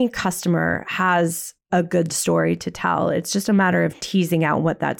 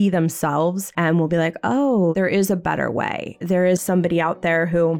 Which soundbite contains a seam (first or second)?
second